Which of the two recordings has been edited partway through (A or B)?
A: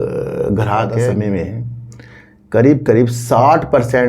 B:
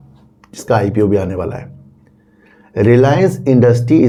A